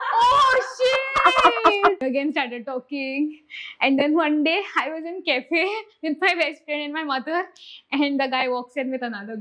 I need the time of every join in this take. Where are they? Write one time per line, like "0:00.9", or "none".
0:02.0